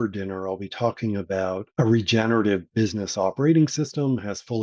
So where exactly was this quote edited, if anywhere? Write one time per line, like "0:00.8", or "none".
0:01.7